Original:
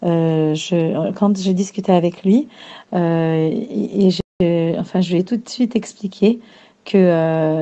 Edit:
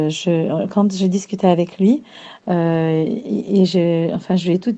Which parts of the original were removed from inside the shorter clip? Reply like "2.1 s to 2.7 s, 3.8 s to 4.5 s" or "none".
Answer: 4.2 s to 4.4 s